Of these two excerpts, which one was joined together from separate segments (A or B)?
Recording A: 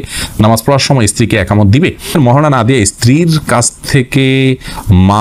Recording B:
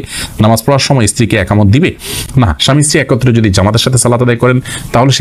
A